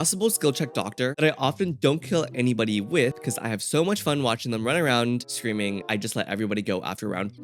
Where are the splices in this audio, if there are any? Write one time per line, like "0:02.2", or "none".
0:01.1
0:05.7